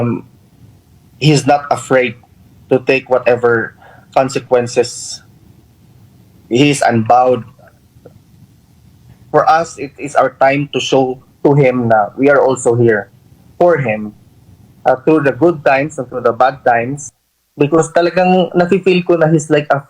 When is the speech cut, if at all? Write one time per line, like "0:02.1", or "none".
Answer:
0:17.0